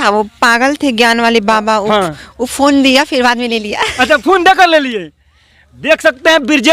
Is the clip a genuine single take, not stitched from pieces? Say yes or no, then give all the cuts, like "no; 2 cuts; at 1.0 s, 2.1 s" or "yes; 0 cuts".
yes; 0 cuts